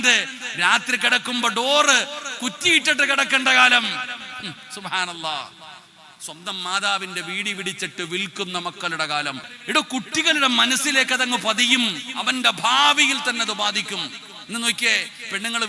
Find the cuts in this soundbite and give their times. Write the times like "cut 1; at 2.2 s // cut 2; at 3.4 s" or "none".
cut 1; at 9.5 s